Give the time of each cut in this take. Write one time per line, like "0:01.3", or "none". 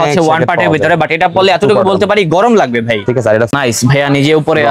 0:03.5